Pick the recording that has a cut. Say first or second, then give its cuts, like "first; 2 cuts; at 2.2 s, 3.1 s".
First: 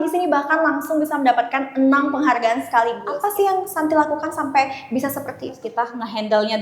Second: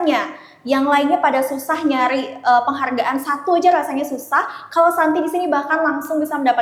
first; 2 cuts; at 3.1 s, 5.6 s